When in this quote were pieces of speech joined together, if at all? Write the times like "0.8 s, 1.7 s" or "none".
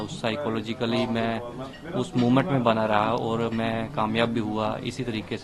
none